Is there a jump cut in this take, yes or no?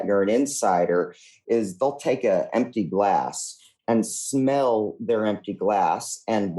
yes